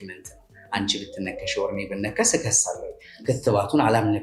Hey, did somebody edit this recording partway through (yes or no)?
no